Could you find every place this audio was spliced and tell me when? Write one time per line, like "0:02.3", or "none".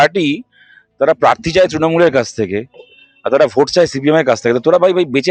none

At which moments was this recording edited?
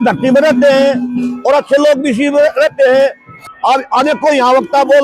0:03.3

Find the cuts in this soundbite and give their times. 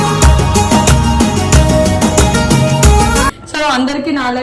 none

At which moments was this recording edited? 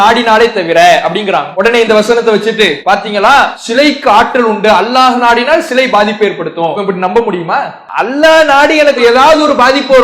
0:01.5
0:02.8
0:03.6
0:06.8
0:07.8

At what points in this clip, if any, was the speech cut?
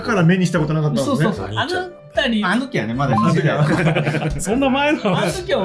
0:01.4
0:04.4

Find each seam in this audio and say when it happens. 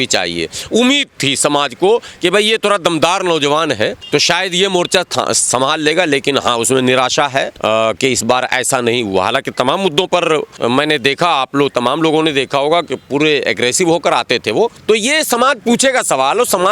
0:04.0
0:07.5
0:10.5
0:14.8

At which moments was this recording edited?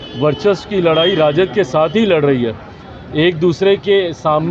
none

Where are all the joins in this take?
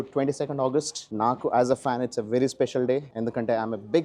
0:01.0
0:03.1

